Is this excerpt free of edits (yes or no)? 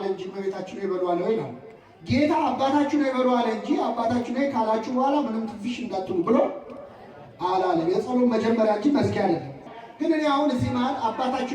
no